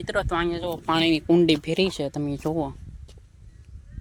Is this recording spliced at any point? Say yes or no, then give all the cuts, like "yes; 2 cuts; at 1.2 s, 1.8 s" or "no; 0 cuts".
no; 0 cuts